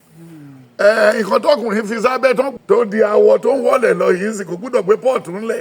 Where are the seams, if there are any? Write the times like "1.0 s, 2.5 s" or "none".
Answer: 2.5 s